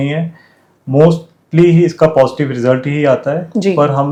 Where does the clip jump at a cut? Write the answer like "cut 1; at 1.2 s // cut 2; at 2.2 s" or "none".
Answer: none